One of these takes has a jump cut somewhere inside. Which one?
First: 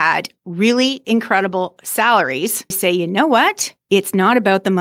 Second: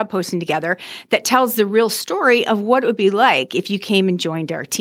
first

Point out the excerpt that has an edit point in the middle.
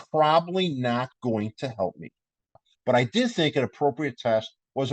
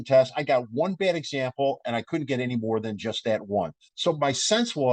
first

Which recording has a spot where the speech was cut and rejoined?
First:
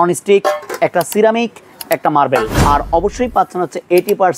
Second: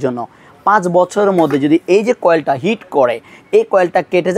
first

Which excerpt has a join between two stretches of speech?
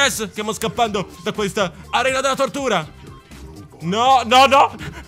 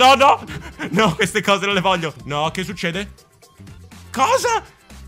second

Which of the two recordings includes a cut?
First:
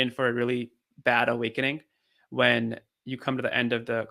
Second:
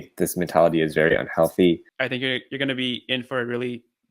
second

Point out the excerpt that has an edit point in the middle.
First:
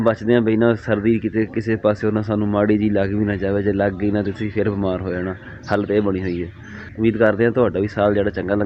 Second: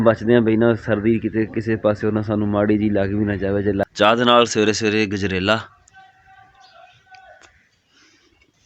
second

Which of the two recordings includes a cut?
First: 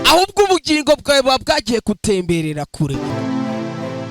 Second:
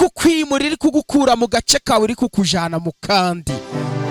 first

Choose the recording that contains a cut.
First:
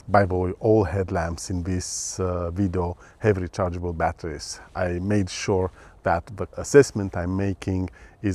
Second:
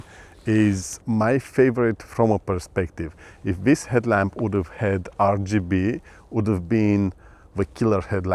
first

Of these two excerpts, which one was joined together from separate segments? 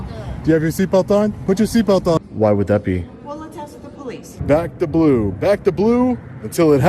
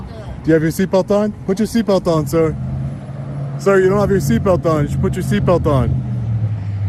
first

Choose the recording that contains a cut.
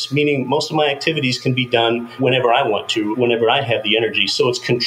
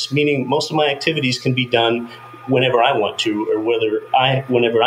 first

